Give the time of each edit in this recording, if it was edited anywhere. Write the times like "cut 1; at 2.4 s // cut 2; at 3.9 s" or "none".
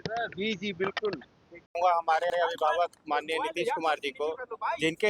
none